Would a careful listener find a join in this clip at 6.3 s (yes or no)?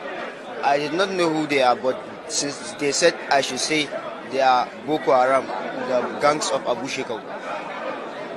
no